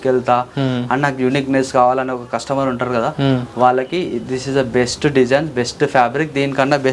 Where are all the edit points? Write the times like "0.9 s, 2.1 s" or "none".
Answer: none